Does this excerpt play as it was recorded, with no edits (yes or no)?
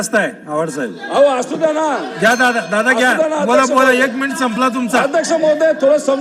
yes